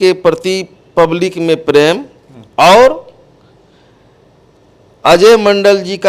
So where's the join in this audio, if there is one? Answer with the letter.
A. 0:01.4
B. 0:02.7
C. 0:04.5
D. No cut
D